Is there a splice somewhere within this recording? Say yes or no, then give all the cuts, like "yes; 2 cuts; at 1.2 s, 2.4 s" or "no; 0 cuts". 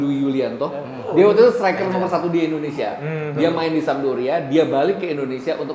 yes; 1 cut; at 1.1 s